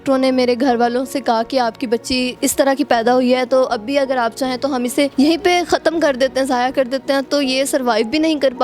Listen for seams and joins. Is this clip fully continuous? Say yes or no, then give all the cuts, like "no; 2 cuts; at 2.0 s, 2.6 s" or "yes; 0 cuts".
no; 2 cuts; at 2.3 s, 5.1 s